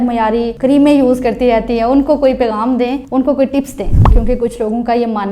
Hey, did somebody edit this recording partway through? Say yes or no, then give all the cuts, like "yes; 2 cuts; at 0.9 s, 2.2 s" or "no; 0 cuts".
yes; 1 cut; at 4.1 s